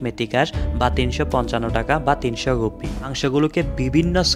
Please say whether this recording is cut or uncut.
cut